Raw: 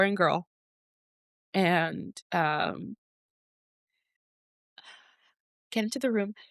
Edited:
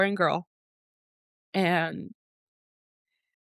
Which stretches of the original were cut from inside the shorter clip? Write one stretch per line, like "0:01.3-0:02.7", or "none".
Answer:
0:02.2-0:03.0